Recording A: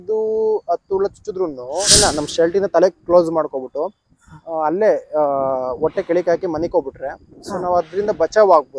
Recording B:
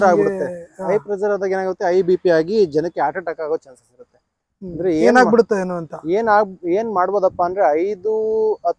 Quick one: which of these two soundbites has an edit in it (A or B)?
A